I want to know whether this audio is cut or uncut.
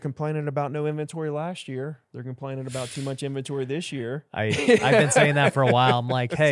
uncut